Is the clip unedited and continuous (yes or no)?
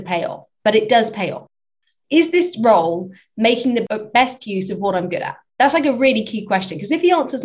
no